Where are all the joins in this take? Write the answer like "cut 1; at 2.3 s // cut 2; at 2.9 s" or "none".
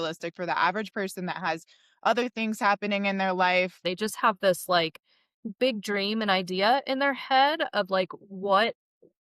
cut 1; at 3.8 s